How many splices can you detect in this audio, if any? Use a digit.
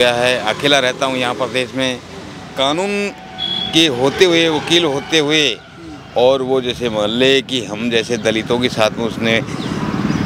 1